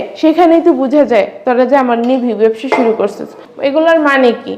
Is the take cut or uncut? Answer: cut